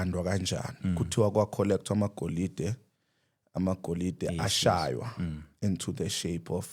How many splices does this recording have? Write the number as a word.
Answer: zero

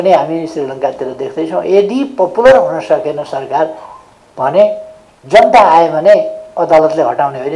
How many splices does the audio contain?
zero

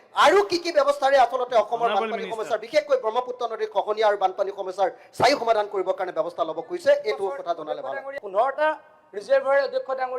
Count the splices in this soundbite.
one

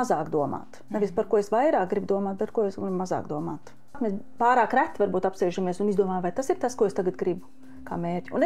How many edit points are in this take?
one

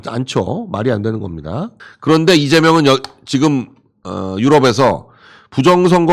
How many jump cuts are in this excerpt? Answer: one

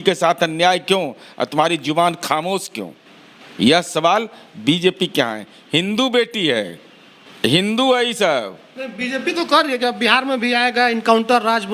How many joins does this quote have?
zero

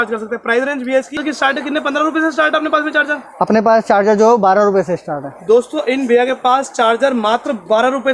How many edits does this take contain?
one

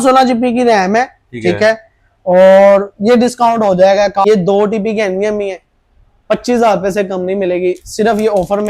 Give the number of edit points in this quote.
one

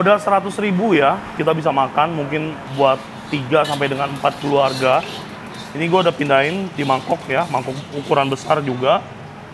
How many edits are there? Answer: two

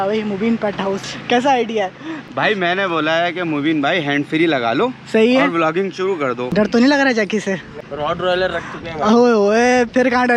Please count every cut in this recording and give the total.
four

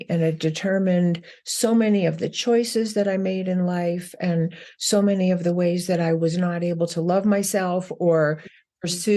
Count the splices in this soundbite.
zero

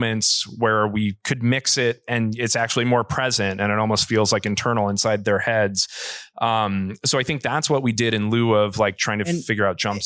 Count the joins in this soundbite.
zero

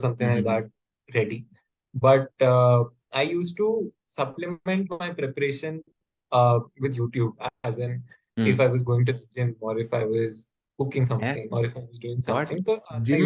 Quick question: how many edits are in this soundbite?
zero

